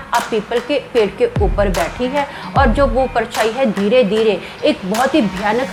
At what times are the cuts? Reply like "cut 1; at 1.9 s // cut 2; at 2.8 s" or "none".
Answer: none